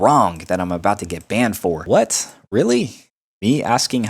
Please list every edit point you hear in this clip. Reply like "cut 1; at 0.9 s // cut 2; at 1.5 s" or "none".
cut 1; at 1.8 s

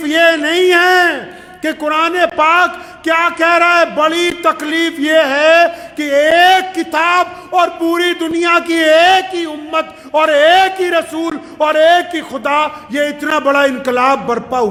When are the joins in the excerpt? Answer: none

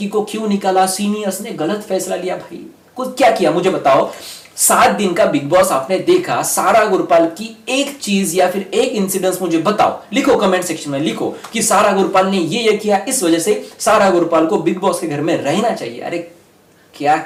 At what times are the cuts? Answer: none

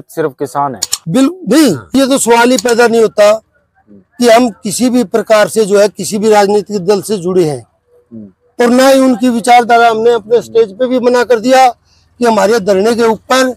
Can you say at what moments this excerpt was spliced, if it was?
cut 1; at 1.9 s

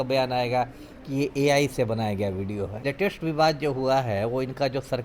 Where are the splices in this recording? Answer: cut 1; at 2.8 s

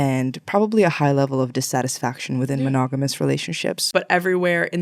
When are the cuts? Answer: cut 1; at 3.8 s

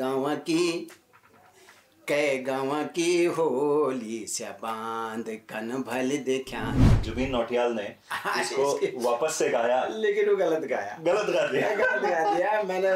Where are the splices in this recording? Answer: cut 1; at 7.1 s

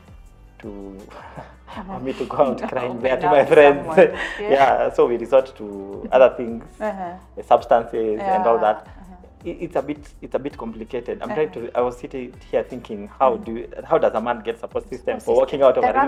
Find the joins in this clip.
none

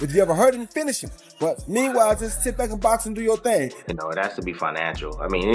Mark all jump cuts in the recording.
cut 1; at 3.8 s

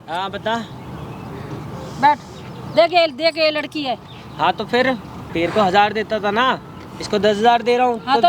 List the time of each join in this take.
cut 1; at 5.2 s

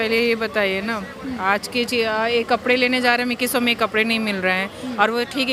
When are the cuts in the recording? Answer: none

